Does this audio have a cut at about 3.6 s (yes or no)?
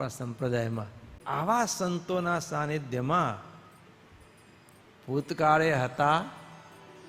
no